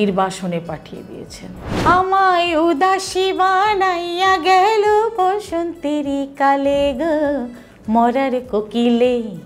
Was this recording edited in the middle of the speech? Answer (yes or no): yes